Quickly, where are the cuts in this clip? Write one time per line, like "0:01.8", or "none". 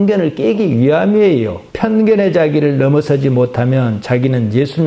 0:01.6